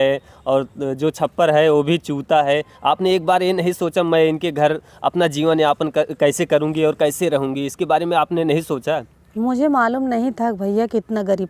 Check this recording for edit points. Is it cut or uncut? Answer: uncut